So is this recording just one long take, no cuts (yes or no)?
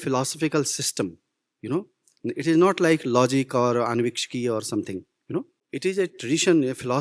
no